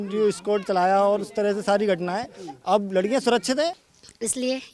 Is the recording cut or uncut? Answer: cut